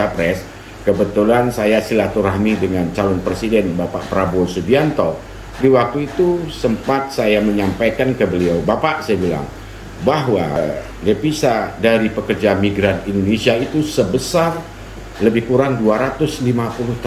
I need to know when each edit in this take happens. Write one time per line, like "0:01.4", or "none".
0:05.5
0:10.6